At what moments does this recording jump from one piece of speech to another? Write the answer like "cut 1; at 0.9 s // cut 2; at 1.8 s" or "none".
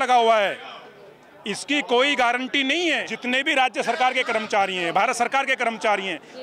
cut 1; at 3.1 s